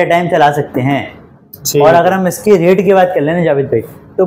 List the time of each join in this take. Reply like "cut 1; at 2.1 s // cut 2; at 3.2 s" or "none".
none